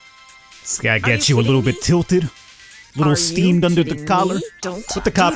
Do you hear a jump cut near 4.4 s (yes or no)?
yes